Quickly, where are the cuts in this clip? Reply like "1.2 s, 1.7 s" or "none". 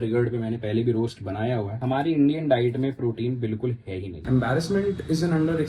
1.8 s, 4.2 s